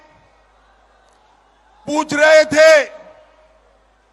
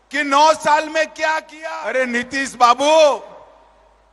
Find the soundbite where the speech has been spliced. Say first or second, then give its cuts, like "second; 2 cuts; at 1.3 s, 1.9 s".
second; 1 cut; at 1.3 s